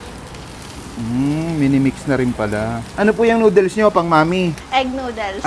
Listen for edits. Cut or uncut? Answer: uncut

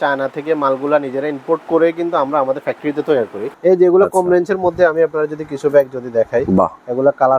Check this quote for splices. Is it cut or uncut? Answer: cut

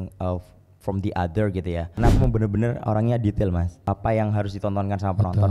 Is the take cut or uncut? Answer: cut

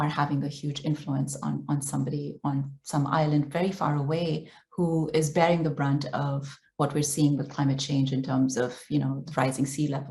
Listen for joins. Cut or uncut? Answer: uncut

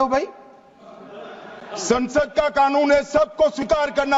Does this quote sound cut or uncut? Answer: uncut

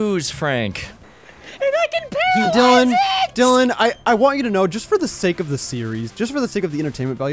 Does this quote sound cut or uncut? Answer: uncut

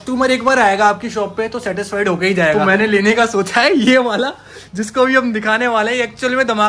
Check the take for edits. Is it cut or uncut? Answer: cut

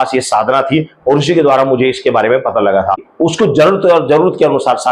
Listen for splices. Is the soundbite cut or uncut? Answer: cut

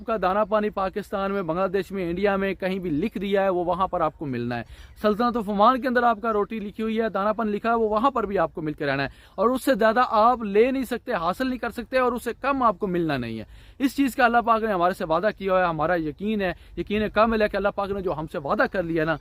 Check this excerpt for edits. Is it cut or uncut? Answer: uncut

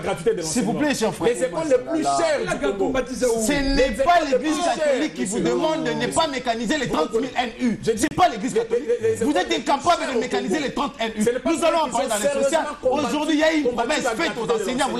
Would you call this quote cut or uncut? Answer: uncut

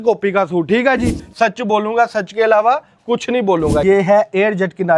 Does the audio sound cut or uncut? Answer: cut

